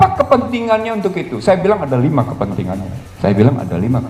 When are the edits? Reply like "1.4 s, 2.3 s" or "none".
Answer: 3.0 s

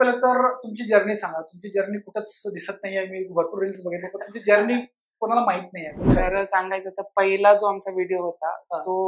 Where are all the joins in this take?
6.1 s

